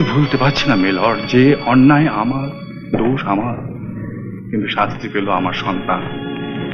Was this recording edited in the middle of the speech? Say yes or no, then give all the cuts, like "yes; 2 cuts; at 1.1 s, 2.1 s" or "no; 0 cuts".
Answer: no; 0 cuts